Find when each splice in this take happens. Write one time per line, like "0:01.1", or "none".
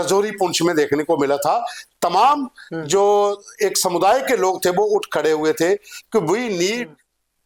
none